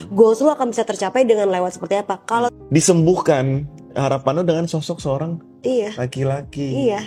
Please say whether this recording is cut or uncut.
cut